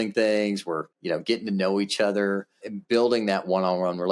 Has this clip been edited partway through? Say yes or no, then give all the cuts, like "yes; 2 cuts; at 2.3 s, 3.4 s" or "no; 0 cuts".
yes; 1 cut; at 0.9 s